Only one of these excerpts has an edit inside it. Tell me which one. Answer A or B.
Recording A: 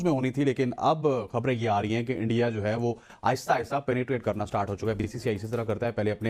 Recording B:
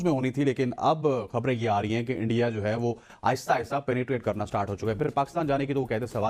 B